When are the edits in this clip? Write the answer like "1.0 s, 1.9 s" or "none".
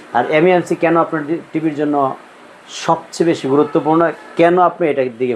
none